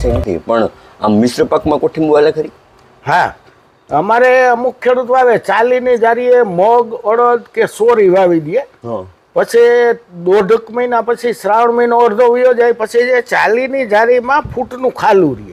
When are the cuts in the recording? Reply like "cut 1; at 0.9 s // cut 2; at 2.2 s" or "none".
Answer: none